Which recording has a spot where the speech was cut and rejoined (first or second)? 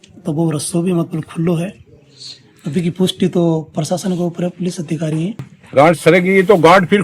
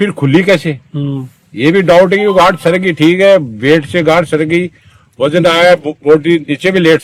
first